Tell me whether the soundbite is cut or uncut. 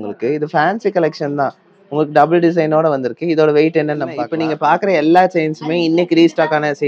cut